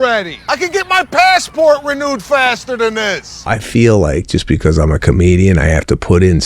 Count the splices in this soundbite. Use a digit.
1